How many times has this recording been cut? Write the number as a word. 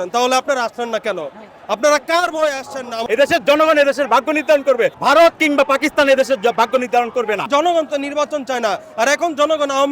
two